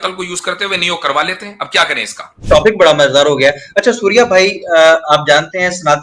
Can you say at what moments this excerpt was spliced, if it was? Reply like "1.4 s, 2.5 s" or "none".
2.3 s